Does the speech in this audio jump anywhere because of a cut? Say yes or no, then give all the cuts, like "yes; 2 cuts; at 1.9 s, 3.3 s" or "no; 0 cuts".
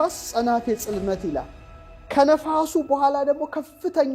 no; 0 cuts